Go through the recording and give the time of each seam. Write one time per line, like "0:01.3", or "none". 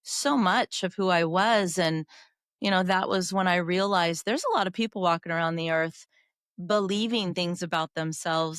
none